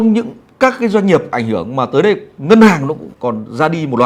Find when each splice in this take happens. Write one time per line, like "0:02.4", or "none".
0:03.1